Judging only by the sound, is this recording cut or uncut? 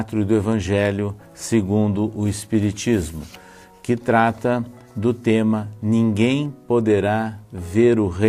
cut